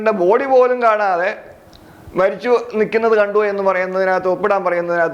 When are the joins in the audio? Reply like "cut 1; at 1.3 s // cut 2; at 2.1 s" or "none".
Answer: none